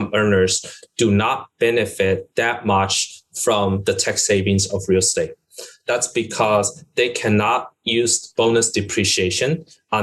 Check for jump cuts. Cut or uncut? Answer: uncut